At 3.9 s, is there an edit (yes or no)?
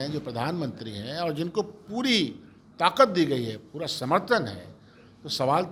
no